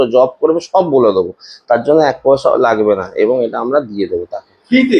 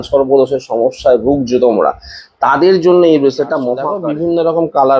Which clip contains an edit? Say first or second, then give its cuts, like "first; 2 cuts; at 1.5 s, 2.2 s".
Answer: second; 1 cut; at 4.0 s